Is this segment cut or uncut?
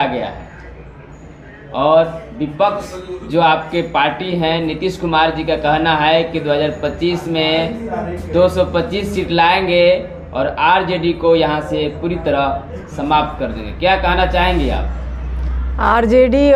uncut